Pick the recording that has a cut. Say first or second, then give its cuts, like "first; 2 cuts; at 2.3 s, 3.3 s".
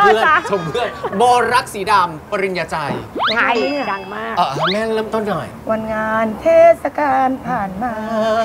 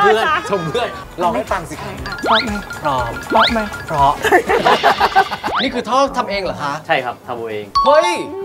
second; 2 cuts; at 1.0 s, 5.5 s